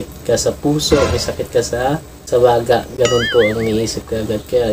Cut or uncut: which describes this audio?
uncut